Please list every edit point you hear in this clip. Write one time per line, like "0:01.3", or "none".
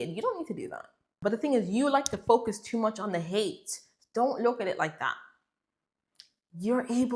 0:01.1